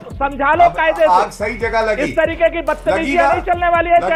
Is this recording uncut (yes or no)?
yes